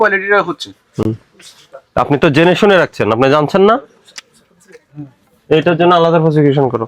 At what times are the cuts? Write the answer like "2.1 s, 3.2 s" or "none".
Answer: none